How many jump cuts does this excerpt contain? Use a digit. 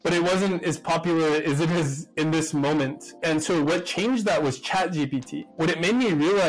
1